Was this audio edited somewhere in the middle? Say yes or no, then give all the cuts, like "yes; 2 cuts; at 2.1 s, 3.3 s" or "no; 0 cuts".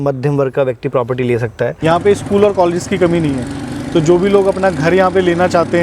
yes; 1 cut; at 1.7 s